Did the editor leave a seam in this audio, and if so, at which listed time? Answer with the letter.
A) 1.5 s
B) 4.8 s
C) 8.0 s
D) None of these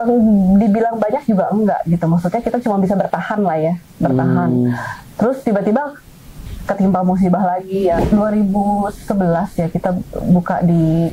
C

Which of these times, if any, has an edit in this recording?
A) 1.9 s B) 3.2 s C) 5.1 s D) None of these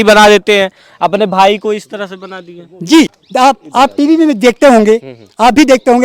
B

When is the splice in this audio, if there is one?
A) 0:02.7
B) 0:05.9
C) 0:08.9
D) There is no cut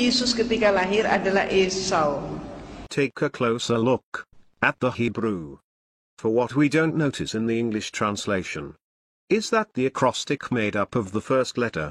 A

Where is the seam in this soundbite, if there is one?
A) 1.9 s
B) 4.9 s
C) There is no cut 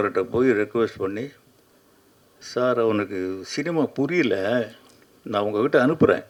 C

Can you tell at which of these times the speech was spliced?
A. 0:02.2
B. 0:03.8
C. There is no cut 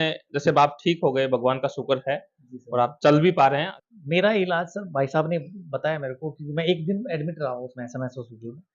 B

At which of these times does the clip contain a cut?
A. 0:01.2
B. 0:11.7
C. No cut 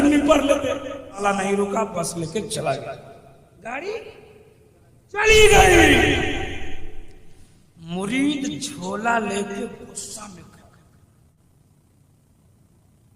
A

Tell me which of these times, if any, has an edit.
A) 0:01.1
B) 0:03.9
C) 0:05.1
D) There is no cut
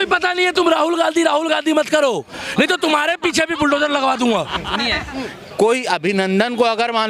C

